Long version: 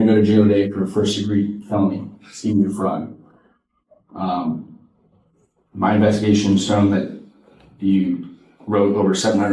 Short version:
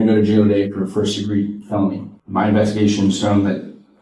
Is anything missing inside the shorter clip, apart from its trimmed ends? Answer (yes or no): yes